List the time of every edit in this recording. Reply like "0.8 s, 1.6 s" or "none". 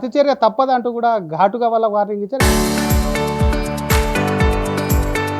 2.3 s